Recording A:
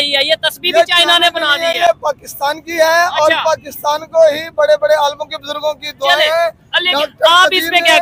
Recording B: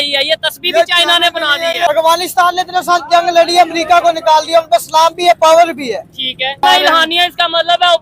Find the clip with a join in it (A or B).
B